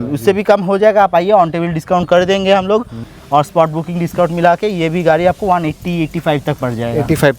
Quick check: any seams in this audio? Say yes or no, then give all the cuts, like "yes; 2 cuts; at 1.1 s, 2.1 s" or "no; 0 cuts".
yes; 1 cut; at 3.1 s